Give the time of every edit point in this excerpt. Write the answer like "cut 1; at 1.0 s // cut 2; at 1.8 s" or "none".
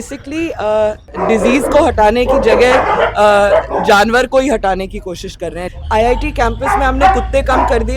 cut 1; at 1.1 s // cut 2; at 5.6 s